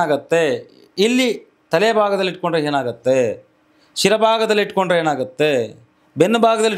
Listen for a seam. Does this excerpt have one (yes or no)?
no